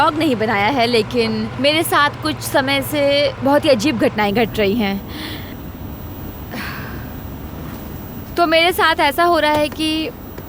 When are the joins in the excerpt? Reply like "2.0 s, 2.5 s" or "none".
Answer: 1.5 s, 3.4 s